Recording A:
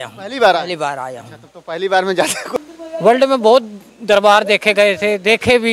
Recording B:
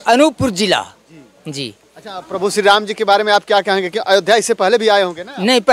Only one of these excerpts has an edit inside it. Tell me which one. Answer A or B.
A